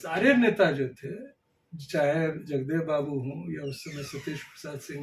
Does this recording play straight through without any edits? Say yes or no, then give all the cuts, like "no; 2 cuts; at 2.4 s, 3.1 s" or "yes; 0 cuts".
yes; 0 cuts